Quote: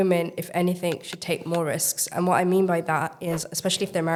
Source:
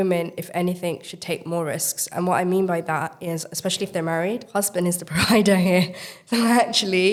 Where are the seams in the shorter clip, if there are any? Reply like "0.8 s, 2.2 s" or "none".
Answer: none